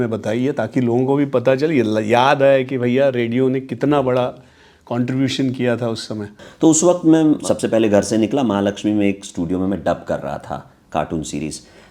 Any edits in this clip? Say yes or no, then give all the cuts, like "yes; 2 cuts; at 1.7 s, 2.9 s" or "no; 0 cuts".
yes; 2 cuts; at 6.2 s, 7.4 s